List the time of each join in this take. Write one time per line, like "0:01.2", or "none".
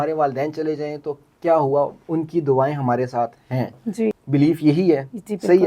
0:04.2